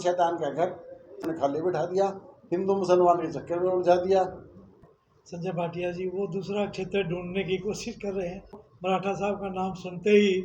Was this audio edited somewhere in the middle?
yes; 3 cuts; at 1.2 s, 4.7 s, 8.7 s

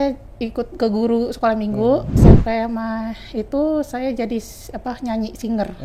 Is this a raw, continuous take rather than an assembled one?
no; 1 cut; at 2.1 s

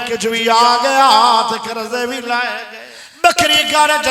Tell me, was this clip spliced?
yes; 1 cut; at 2.7 s

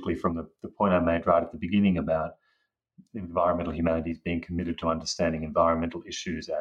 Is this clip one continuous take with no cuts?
yes; 0 cuts

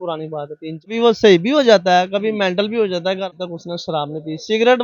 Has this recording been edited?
yes; 2 cuts; at 0.9 s, 3.3 s

